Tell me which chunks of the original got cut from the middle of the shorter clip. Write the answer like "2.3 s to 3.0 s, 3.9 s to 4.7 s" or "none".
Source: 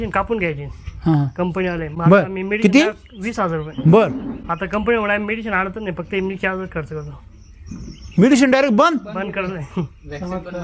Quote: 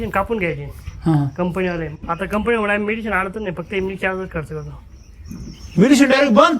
1.9 s to 4.3 s